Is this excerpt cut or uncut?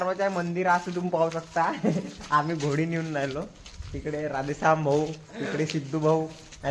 uncut